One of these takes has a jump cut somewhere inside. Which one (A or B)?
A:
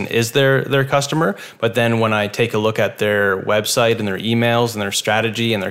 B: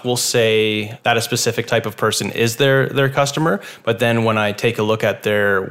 B